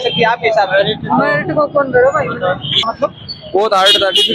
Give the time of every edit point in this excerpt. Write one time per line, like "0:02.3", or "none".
0:02.9